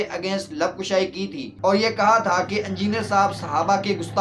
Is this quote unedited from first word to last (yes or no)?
yes